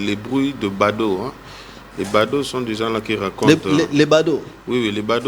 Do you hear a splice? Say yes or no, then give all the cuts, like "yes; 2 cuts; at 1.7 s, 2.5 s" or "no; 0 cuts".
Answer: no; 0 cuts